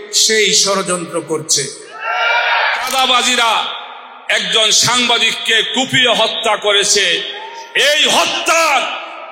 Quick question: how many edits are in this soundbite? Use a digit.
1